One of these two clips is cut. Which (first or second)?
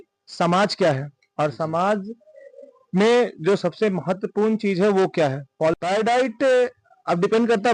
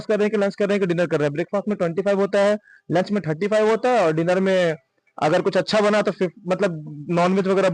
first